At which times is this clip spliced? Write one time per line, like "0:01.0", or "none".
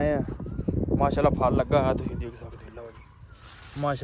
none